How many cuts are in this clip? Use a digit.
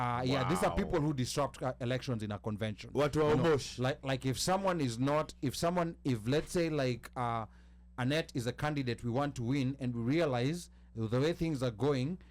0